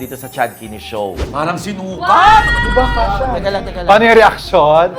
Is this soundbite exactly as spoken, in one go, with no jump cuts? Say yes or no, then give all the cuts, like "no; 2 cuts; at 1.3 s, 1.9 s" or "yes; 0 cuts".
no; 1 cut; at 1.2 s